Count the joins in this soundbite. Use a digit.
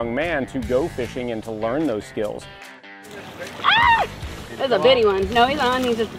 1